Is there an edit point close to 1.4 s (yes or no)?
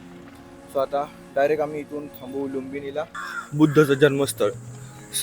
no